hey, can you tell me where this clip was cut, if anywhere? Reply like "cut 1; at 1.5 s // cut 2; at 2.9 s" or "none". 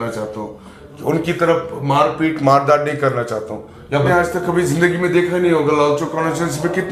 cut 1; at 4.1 s